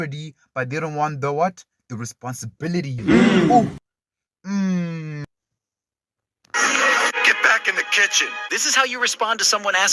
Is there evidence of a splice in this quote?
no; 0 cuts

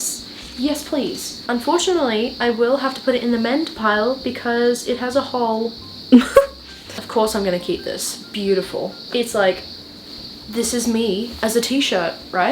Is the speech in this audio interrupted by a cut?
no; 0 cuts

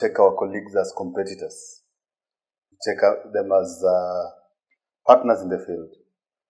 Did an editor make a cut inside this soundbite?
no; 0 cuts

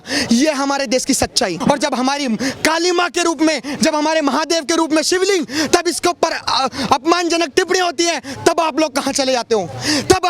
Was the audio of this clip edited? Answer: yes; 1 cut; at 1.5 s

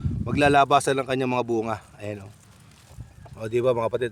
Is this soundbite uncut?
yes; 0 cuts

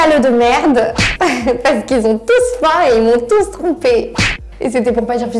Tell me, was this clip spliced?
no; 0 cuts

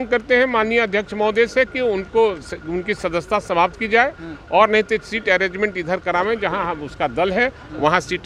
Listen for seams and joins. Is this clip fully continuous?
yes; 0 cuts

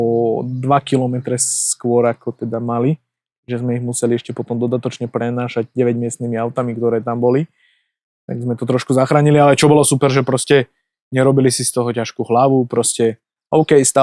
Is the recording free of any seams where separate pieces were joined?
yes; 0 cuts

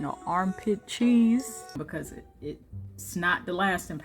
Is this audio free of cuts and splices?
no; 1 cut; at 1.8 s

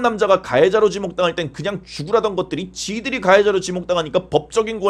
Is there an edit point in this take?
no; 0 cuts

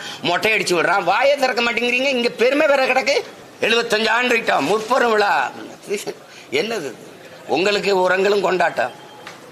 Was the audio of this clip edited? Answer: yes; 2 cuts; at 3.4 s, 5.7 s

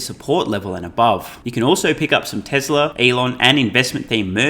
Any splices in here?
yes; 2 cuts; at 1.4 s, 2.9 s

